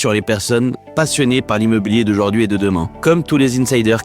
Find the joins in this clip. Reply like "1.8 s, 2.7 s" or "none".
2.9 s

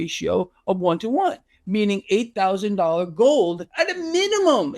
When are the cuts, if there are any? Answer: 3.6 s

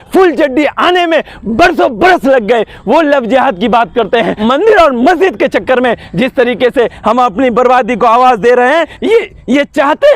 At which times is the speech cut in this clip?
4.3 s, 8.9 s

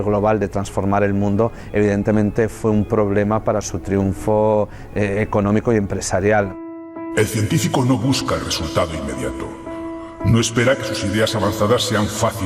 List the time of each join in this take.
none

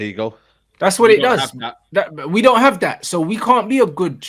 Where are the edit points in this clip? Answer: none

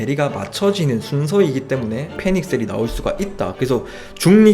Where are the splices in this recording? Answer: 2.1 s, 3.5 s

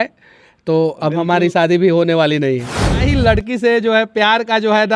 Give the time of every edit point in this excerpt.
3.0 s

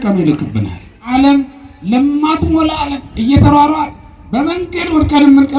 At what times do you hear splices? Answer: 1.0 s

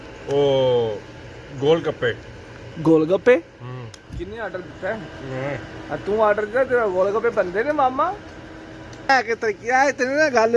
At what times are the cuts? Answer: 9.1 s

